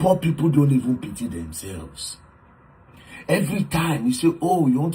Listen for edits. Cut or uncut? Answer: uncut